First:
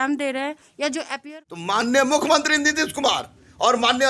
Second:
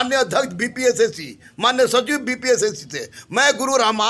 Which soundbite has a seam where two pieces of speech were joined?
first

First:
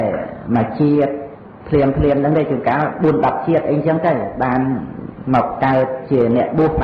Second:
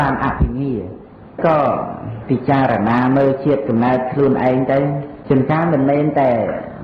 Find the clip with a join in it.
second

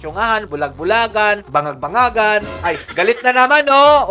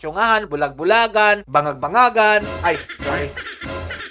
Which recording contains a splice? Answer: first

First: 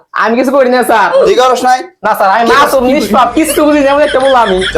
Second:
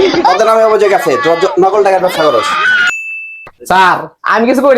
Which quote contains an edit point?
second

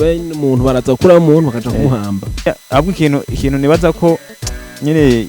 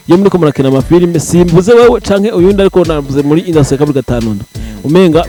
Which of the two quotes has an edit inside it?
first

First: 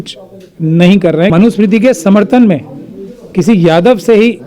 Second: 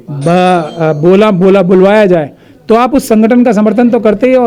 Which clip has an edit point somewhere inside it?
first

